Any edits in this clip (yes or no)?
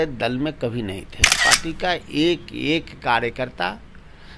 yes